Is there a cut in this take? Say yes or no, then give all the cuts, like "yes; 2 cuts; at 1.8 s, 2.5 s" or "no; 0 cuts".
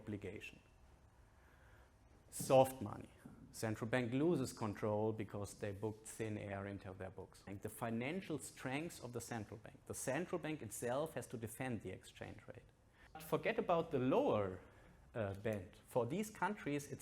yes; 2 cuts; at 7.5 s, 13.2 s